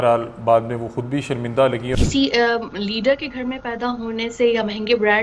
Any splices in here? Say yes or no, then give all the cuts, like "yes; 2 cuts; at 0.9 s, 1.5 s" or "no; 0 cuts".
yes; 1 cut; at 2.0 s